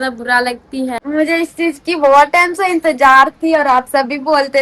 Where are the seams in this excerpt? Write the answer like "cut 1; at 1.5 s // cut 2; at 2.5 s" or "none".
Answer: cut 1; at 1.0 s

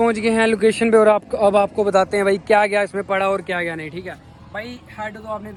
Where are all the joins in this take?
none

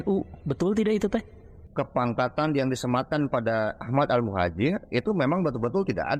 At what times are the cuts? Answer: cut 1; at 1.6 s

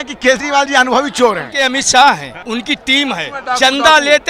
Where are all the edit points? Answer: cut 1; at 1.5 s // cut 2; at 2.3 s // cut 3; at 3.3 s

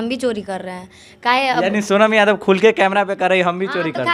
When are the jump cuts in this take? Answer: none

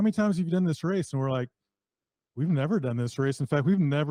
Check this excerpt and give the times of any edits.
none

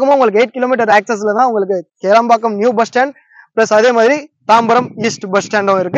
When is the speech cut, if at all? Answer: none

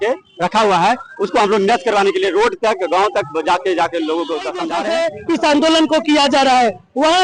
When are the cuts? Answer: cut 1; at 4.7 s

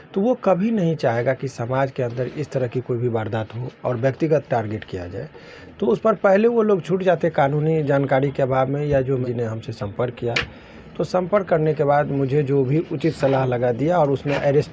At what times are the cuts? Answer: cut 1; at 9.2 s

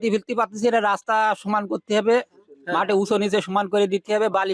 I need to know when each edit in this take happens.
none

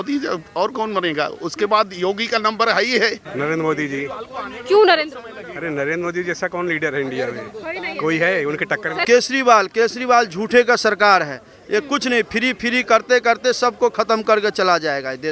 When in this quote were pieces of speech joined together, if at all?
cut 1; at 3.2 s // cut 2; at 9.0 s

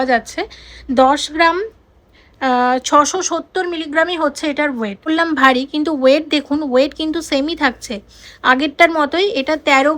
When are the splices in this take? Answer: cut 1; at 5.1 s

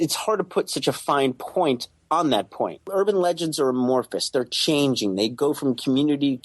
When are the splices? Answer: cut 1; at 2.8 s

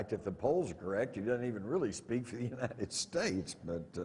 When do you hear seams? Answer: none

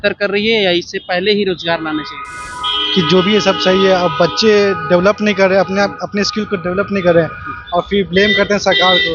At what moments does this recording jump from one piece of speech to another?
none

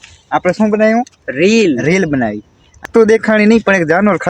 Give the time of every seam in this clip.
cut 1; at 2.9 s

